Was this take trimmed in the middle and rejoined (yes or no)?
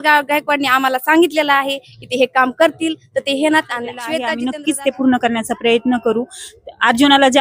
yes